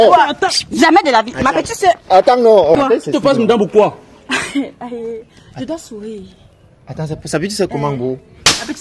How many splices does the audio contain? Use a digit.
1